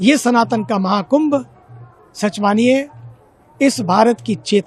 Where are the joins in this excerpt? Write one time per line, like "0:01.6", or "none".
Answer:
none